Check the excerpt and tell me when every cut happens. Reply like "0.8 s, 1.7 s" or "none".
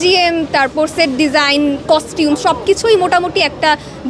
none